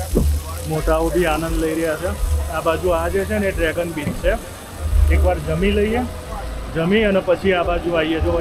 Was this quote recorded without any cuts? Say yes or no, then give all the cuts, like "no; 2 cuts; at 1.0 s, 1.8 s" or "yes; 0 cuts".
yes; 0 cuts